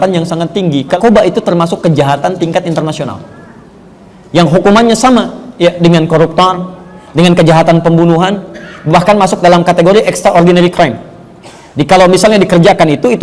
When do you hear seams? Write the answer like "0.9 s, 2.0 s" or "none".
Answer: 1.0 s